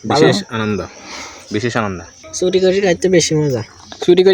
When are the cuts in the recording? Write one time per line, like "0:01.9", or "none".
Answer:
0:02.2